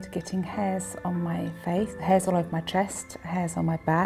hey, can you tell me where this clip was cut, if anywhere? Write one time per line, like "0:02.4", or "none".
0:02.0